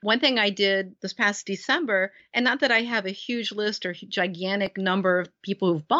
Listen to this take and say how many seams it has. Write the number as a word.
two